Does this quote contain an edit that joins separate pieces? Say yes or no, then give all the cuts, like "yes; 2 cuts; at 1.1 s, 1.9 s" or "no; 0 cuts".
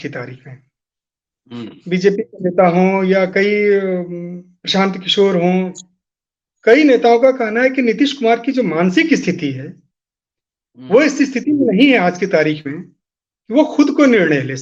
no; 0 cuts